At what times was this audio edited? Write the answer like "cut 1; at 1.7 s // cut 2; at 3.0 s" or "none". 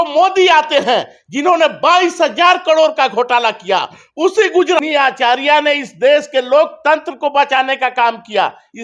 cut 1; at 4.8 s